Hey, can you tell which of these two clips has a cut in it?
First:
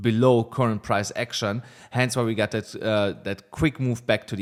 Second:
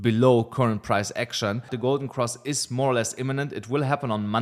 second; 1 cut; at 1.7 s

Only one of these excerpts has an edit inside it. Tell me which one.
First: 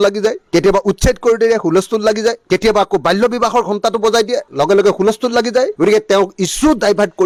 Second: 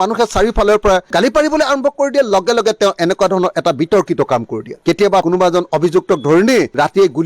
second; 1 cut; at 5.2 s

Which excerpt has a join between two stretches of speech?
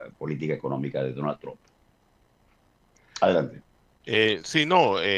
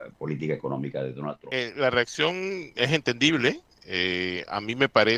second; 1 cut; at 1.5 s

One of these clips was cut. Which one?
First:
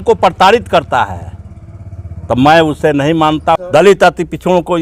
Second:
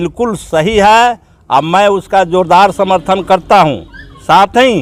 first; 1 cut; at 3.6 s

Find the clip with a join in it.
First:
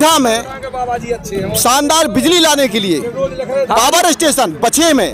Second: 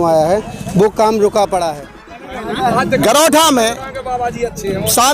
second; 1 cut; at 2.2 s

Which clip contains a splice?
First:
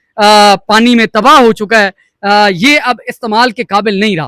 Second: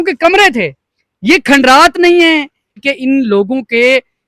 second; 1 cut; at 2.8 s

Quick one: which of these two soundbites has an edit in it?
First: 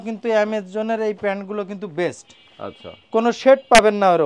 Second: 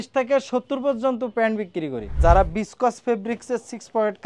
second; 1 cut; at 2.1 s

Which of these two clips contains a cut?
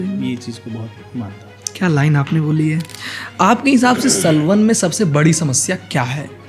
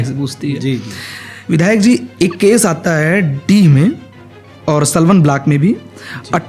first; 1 cut; at 2.9 s

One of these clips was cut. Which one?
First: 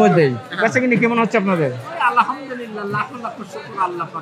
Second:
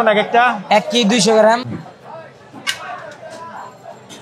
second; 1 cut; at 1.7 s

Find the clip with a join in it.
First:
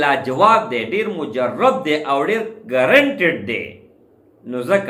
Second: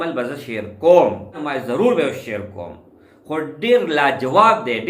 second; 1 cut; at 1.5 s

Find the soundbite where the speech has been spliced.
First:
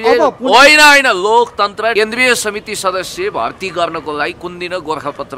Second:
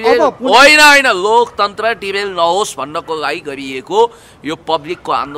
first; 1 cut; at 1.9 s

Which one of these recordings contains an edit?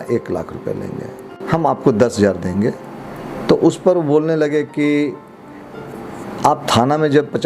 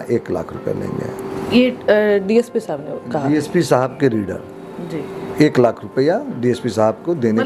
first; 1 cut; at 1.3 s

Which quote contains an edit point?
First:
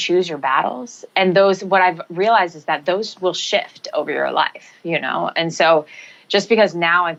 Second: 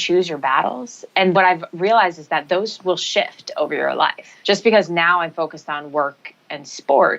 second; 2 cuts; at 1.3 s, 4.3 s

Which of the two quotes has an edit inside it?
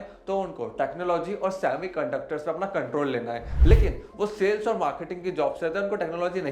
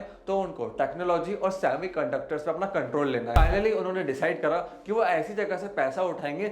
second; 1 cut; at 3.4 s

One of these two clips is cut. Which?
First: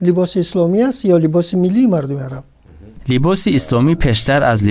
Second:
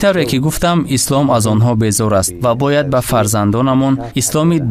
first; 1 cut; at 3.0 s

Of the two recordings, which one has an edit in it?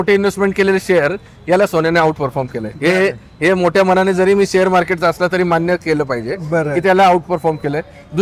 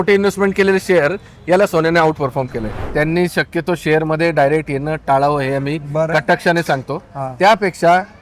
second; 1 cut; at 2.6 s

